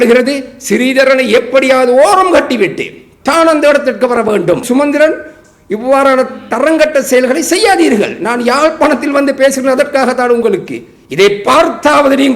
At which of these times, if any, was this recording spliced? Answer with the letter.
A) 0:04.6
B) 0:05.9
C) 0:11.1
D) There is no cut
A